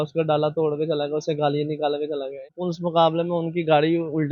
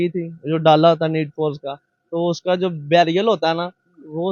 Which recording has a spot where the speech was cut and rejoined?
first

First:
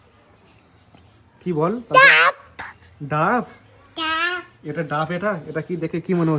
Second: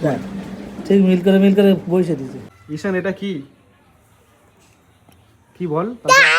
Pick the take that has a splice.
second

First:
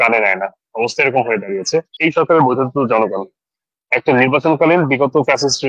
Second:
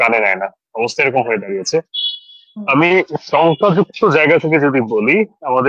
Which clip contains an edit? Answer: first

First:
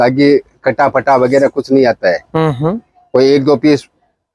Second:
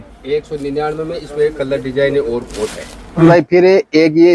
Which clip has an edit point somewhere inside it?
second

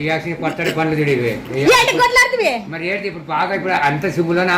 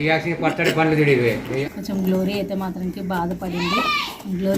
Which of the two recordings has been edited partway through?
second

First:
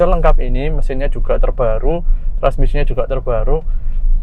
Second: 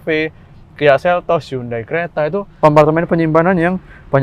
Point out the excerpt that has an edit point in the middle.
second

